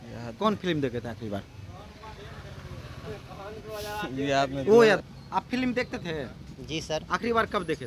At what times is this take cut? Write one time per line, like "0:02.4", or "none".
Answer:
0:05.1